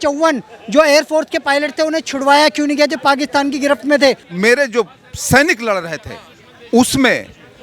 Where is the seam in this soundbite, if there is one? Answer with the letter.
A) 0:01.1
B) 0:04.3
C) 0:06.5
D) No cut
B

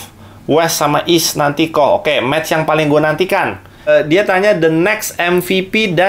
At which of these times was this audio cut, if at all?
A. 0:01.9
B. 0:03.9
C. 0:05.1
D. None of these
B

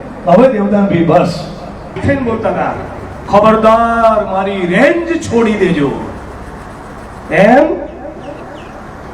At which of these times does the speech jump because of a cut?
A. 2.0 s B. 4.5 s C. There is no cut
A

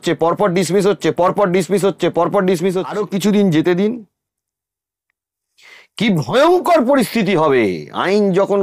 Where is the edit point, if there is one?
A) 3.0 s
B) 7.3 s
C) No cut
A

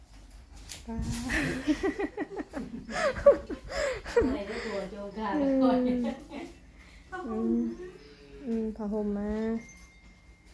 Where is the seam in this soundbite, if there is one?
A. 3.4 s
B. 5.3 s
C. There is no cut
C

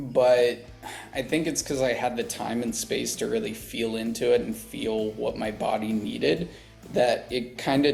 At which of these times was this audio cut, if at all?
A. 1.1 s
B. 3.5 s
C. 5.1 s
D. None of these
D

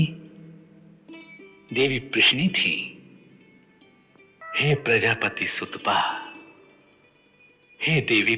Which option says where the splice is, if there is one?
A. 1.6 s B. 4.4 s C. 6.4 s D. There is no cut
B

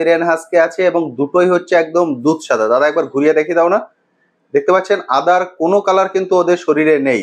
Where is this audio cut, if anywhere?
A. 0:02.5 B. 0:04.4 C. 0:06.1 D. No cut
D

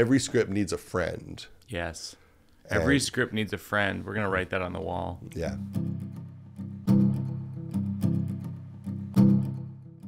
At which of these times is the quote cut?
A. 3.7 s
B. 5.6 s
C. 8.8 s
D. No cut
B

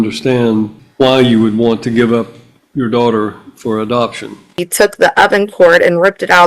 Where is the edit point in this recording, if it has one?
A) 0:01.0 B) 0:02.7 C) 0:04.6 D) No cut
C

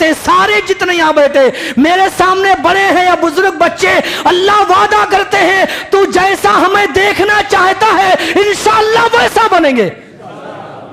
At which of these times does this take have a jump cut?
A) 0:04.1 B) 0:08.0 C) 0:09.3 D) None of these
D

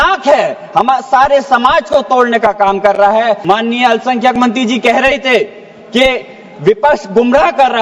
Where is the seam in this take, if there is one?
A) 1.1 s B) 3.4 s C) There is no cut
B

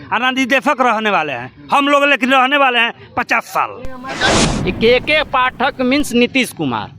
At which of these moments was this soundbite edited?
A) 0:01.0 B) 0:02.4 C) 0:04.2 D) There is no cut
C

